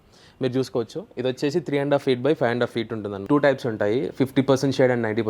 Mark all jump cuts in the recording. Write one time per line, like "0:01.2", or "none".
0:03.2